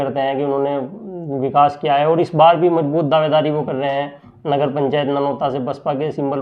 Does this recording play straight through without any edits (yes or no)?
yes